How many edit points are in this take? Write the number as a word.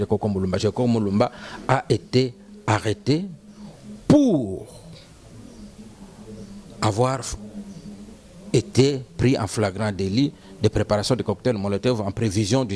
zero